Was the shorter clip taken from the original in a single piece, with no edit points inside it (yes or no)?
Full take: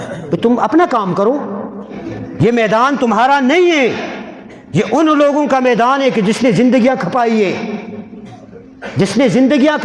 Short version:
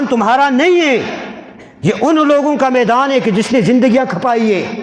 yes